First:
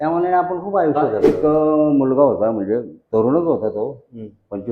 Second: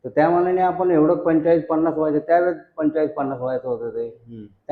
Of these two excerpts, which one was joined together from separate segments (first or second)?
first